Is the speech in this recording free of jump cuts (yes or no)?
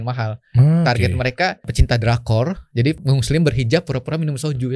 no